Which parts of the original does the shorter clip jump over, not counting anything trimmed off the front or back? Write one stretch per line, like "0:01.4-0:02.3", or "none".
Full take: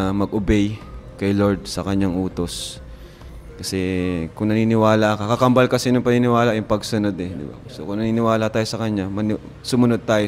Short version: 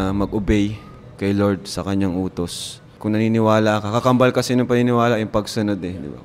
0:02.9-0:04.3